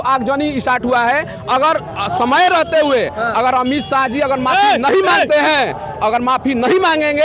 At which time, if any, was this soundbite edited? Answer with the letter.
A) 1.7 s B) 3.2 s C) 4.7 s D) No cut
D